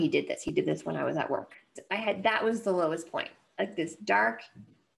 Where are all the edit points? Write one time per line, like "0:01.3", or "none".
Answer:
0:01.8